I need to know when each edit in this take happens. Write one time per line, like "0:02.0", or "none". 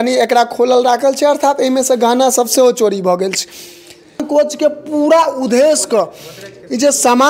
0:04.2